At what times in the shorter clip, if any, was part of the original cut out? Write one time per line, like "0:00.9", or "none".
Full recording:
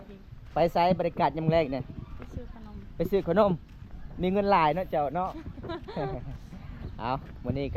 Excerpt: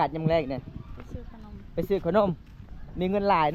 none